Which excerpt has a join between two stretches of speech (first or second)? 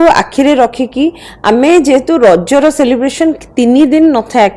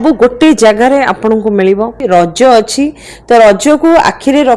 second